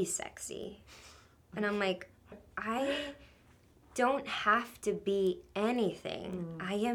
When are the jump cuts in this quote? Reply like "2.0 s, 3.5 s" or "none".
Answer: 2.4 s

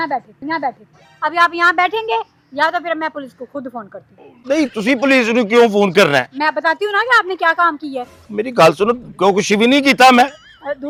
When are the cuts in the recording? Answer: none

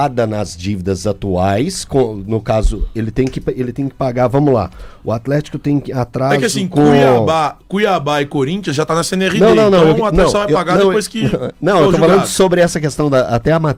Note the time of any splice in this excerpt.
none

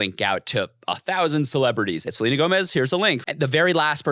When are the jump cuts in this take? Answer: 2.1 s, 3.3 s

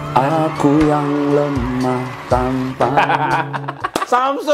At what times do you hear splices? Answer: none

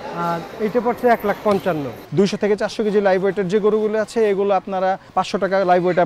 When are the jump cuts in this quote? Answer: 2.0 s, 5.0 s

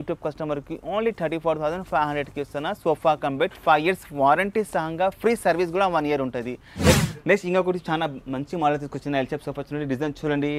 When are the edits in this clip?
none

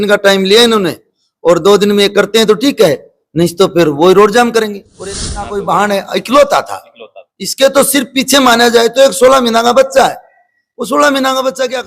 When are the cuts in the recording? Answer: 5.0 s

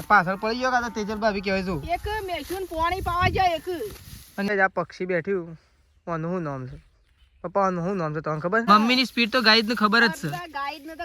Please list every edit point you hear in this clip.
4.5 s, 8.7 s

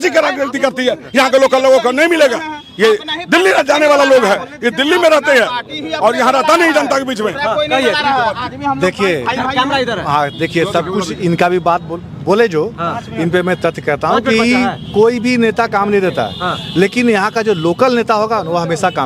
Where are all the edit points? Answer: none

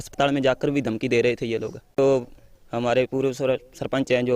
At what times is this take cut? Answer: 2.0 s

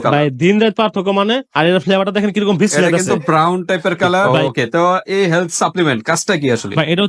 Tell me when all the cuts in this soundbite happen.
4.3 s

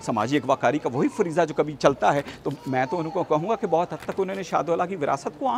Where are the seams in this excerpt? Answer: none

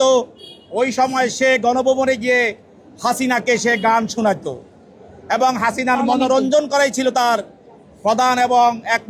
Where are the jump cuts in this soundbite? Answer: none

